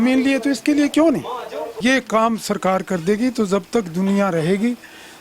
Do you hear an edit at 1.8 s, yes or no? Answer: yes